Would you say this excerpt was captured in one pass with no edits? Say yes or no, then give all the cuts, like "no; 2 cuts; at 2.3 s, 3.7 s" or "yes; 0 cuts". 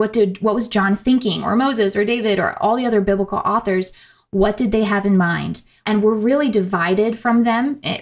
no; 1 cut; at 5.7 s